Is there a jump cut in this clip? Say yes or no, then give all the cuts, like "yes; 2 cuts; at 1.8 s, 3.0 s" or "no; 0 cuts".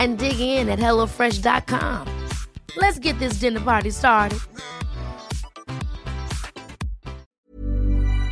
yes; 1 cut; at 7.3 s